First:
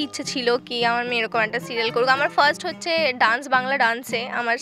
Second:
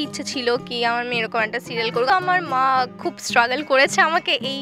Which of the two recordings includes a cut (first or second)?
second